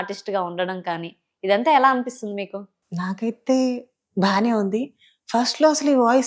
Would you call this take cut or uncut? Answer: uncut